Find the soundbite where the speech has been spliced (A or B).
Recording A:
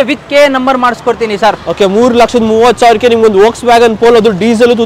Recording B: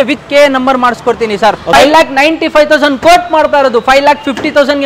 B